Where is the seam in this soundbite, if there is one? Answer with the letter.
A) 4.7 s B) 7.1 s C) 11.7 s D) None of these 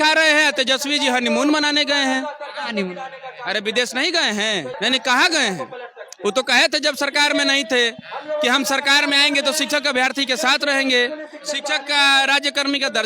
A